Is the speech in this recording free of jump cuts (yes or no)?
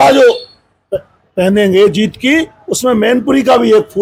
yes